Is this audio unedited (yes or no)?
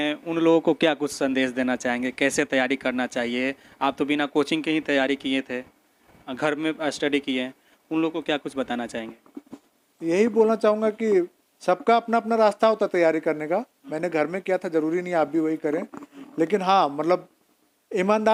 yes